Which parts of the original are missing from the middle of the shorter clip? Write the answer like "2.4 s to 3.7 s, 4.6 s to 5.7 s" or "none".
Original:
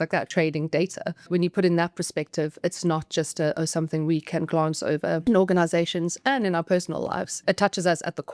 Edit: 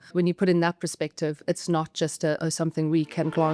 none